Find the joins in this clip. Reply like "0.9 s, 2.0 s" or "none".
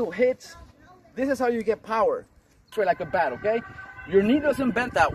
2.7 s